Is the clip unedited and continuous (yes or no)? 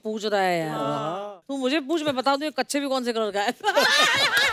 no